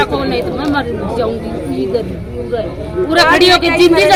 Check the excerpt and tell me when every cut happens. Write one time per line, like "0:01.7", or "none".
none